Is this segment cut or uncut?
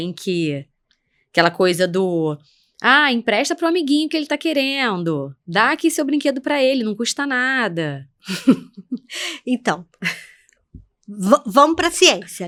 uncut